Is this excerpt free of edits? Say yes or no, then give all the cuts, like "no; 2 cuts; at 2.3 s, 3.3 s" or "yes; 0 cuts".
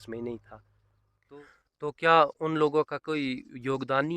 no; 1 cut; at 1.2 s